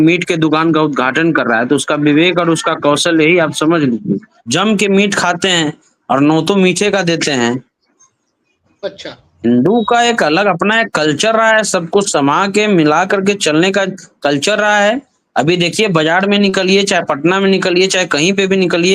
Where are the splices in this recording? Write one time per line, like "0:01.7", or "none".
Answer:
0:04.4